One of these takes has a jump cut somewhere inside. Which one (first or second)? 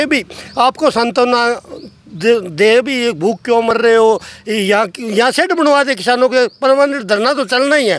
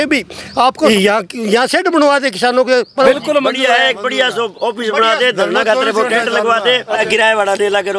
second